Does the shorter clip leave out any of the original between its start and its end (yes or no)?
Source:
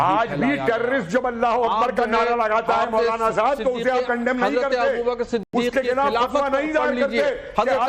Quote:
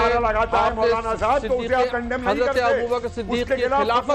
yes